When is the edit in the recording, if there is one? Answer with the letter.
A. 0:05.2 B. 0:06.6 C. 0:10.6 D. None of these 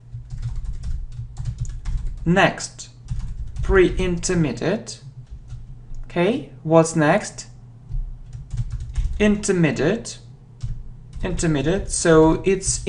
D